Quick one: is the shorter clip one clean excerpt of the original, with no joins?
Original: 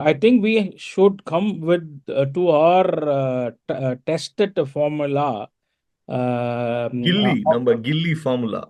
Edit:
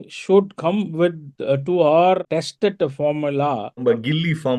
no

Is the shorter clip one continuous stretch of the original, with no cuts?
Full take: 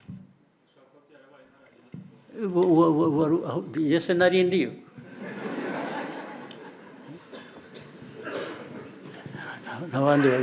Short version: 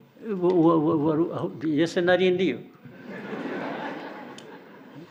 yes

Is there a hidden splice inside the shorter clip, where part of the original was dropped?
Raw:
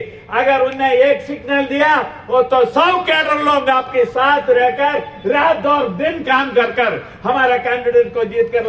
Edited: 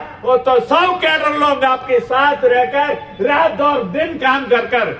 no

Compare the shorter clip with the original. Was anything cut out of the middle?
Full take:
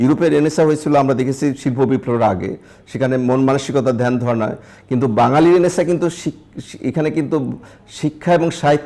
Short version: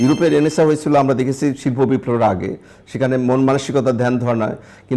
no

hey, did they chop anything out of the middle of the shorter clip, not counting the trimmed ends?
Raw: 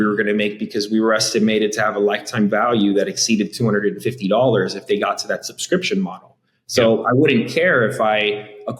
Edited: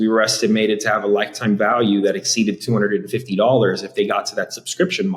no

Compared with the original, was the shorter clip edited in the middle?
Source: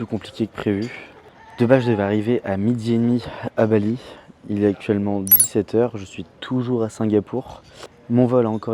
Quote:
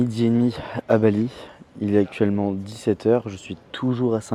no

